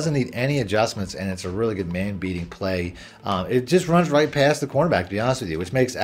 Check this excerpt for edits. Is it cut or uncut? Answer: uncut